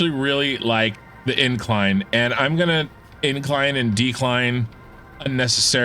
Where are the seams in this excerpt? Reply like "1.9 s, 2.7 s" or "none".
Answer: 0.9 s